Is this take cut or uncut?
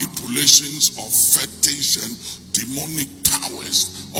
uncut